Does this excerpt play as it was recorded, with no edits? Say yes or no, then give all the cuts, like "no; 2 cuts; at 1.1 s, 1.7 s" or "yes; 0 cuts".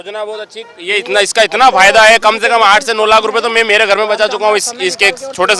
yes; 0 cuts